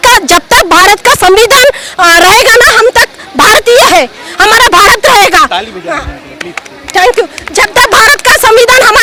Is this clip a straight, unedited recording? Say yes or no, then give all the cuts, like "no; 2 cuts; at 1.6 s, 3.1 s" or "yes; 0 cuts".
yes; 0 cuts